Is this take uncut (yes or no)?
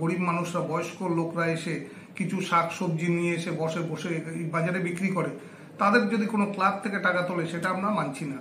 yes